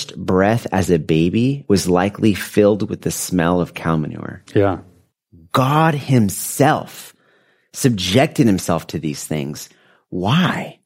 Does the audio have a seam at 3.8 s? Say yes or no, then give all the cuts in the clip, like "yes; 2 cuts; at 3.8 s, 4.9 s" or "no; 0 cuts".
no; 1 cut; at 1.6 s